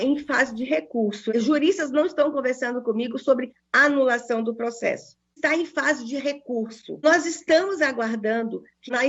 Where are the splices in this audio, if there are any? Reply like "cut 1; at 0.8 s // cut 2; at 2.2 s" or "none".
none